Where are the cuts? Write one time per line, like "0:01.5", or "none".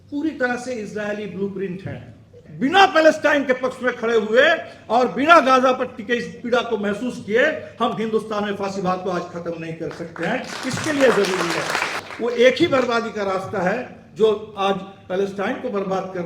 0:02.4
0:12.0